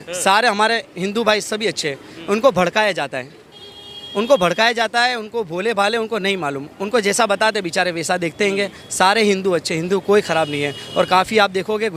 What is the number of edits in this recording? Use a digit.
0